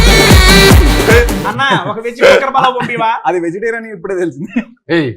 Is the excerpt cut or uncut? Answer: cut